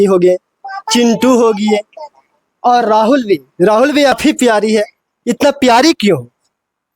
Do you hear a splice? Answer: yes; 1 cut; at 4.2 s

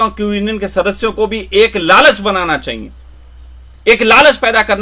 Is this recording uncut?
yes; 0 cuts

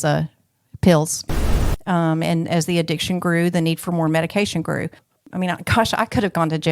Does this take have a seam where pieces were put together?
yes; 2 cuts; at 1.6 s, 5.2 s

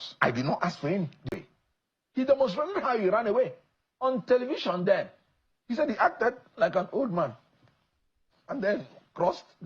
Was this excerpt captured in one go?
no; 1 cut; at 1.4 s

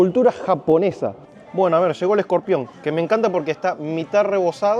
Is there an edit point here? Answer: yes; 1 cut; at 1.2 s

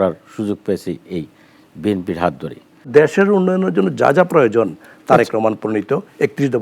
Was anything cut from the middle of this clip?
yes; 1 cut; at 2.9 s

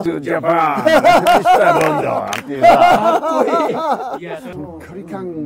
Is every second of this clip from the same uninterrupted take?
no; 1 cut; at 4.5 s

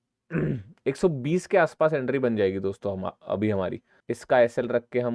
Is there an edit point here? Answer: yes; 1 cut; at 3.9 s

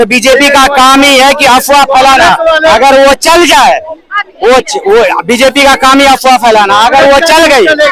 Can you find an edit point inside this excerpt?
no; 0 cuts

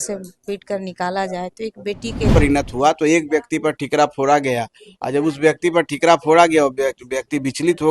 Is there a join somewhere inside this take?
yes; 1 cut; at 2.3 s

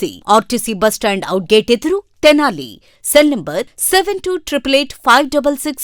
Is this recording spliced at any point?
no; 0 cuts

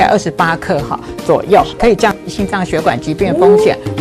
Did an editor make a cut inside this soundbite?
no; 0 cuts

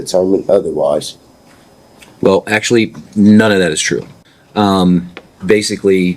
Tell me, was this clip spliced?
no; 0 cuts

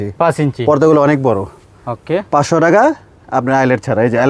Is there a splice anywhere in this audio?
no; 0 cuts

